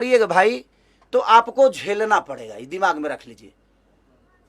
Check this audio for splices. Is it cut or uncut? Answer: uncut